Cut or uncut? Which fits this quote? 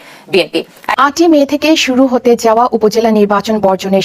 cut